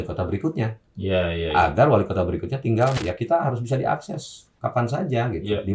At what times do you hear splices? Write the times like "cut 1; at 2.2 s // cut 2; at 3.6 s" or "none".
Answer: cut 1; at 3.0 s